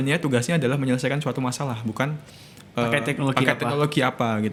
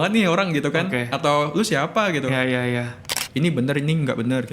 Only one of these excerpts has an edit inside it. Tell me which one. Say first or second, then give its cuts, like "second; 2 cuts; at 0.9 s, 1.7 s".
second; 1 cut; at 3.2 s